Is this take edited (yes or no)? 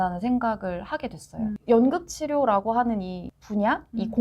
yes